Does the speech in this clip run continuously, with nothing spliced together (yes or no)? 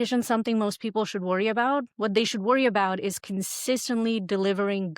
yes